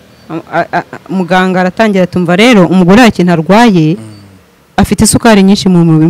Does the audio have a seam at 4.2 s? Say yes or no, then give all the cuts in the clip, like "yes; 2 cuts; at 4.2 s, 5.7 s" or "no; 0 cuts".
no; 0 cuts